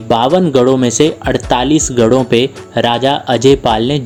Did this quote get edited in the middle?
no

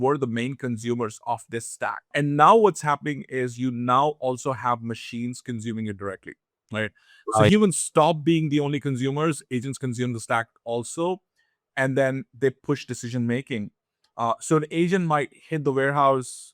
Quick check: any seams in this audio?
yes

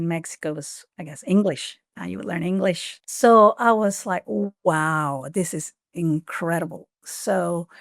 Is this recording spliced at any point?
yes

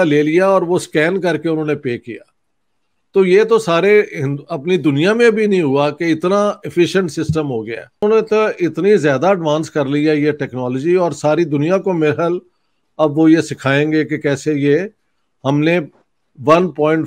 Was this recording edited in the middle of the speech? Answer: yes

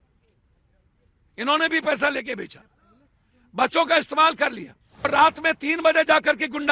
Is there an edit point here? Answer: yes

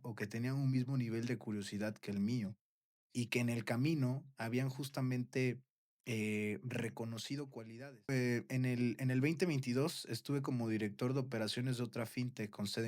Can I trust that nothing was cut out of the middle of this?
no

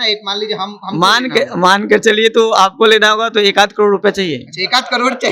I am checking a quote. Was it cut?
no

